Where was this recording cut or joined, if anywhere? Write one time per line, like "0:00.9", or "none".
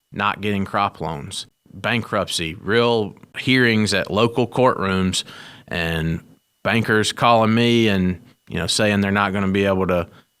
0:01.4
0:03.3